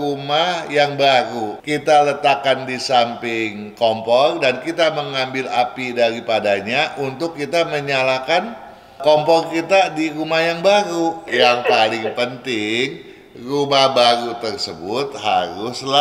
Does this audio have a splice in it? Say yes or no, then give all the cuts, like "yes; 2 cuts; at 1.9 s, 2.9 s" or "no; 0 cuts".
yes; 2 cuts; at 1.5 s, 11.3 s